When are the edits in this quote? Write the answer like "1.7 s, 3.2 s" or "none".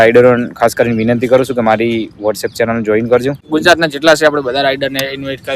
3.4 s